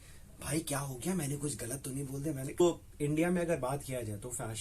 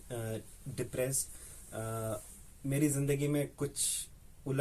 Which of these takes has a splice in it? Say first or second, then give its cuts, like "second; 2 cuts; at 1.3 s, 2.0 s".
first; 1 cut; at 2.6 s